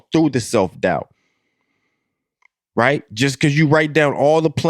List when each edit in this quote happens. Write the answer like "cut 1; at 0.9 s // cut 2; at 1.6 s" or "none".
none